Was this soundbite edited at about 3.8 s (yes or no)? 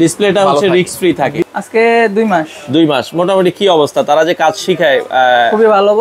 no